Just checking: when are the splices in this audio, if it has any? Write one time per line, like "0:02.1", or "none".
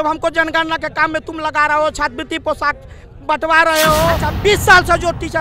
0:04.3